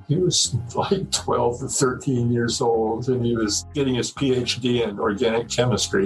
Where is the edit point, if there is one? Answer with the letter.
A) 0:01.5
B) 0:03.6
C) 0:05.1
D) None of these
B